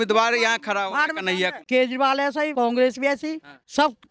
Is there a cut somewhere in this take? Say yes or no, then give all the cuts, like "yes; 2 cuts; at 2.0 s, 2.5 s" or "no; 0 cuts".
yes; 2 cuts; at 1.6 s, 2.5 s